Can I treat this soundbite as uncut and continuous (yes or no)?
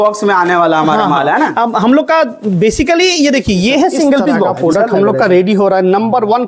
no